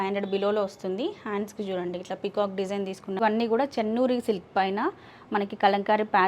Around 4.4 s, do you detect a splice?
no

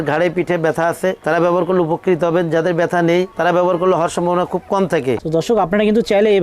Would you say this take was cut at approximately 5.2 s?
yes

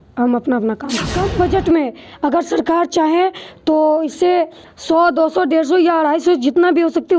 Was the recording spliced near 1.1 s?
yes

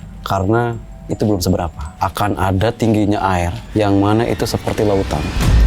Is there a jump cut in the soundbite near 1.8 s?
yes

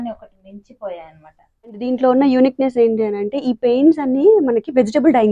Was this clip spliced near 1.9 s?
yes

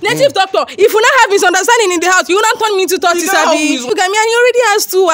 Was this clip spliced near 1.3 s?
no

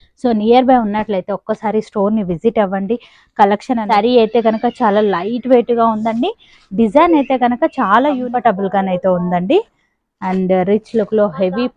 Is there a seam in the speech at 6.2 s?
no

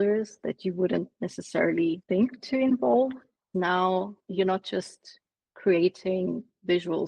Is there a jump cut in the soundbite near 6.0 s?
no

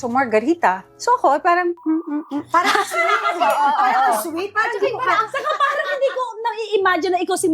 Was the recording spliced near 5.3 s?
yes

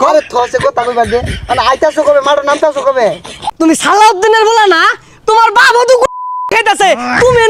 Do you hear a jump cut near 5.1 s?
no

